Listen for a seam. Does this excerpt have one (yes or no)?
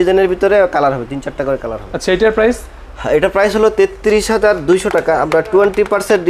no